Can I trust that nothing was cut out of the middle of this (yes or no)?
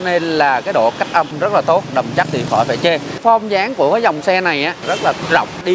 no